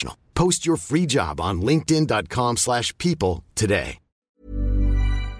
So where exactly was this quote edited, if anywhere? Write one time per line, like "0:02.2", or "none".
0:04.1